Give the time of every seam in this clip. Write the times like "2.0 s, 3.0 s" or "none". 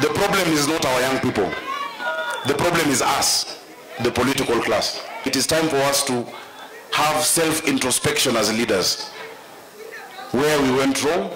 5.3 s